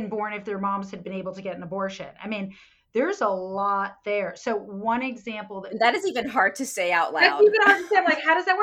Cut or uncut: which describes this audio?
uncut